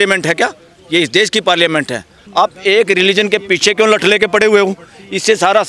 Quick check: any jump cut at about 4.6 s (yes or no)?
no